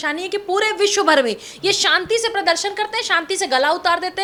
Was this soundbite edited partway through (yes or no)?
no